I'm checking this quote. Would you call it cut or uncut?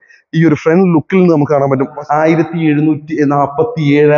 cut